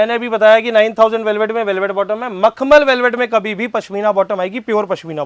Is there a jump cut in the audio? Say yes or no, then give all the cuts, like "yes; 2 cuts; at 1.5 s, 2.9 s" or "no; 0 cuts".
no; 0 cuts